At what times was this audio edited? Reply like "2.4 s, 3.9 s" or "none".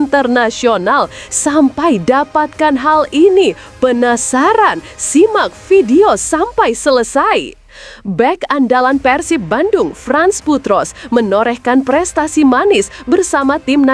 none